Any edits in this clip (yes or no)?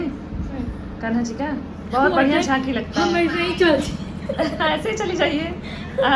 no